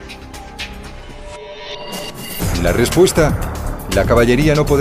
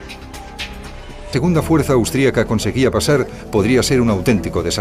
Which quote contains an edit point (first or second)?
first